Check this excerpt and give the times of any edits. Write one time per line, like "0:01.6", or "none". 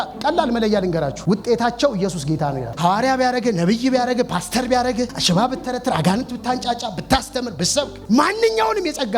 0:01.2
0:02.7
0:05.2